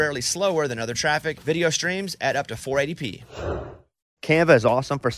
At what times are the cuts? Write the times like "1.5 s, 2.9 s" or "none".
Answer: 4.1 s

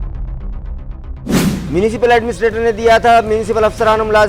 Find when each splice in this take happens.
1.4 s

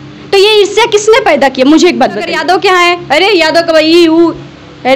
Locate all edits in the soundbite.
2.3 s

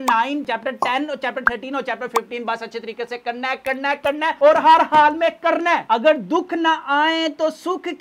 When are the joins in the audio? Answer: 5.8 s

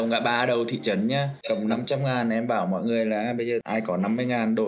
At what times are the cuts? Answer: 1.4 s, 3.6 s

